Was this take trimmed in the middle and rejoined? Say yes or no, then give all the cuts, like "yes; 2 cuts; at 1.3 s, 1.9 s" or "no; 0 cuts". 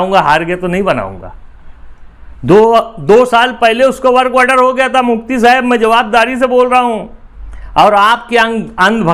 no; 0 cuts